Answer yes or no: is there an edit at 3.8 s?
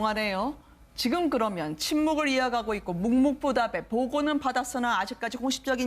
yes